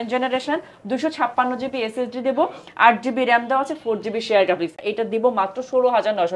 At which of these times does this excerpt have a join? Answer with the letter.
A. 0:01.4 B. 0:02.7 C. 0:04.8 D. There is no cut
C